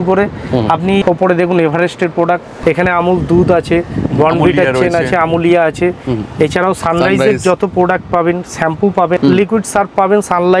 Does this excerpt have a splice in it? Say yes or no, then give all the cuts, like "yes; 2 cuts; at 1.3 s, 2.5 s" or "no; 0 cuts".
yes; 3 cuts; at 1.0 s, 2.5 s, 9.2 s